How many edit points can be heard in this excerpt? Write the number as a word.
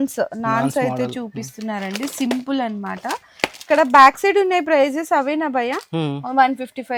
zero